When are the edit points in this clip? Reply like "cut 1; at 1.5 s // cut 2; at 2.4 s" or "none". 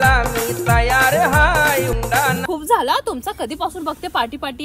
cut 1; at 2.4 s